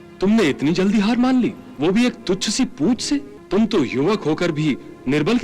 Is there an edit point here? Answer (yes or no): yes